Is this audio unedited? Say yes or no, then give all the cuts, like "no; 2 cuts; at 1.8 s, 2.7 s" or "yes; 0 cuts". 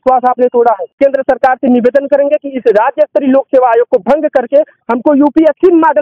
no; 1 cut; at 1.0 s